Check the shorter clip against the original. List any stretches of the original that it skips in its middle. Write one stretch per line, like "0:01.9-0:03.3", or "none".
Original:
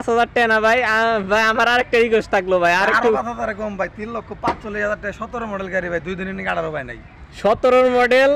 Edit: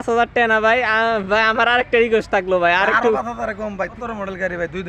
0:03.9-0:05.3